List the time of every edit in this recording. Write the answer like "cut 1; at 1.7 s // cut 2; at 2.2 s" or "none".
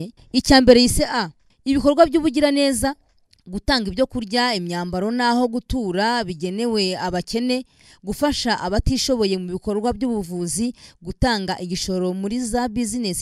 none